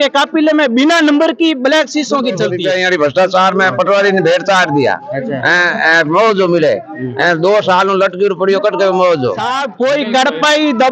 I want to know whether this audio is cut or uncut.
cut